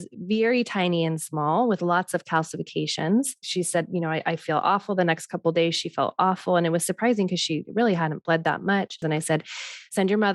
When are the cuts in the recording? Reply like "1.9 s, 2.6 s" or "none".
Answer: 3.5 s, 9.0 s